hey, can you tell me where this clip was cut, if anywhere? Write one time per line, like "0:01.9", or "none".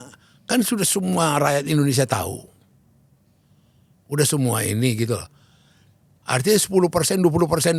none